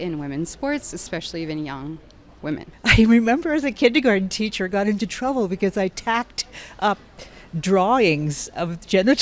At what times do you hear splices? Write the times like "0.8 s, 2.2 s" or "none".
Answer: 2.7 s